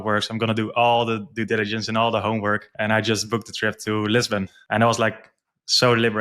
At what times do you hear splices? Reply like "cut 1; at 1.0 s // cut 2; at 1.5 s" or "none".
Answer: cut 1; at 2.7 s // cut 2; at 4.6 s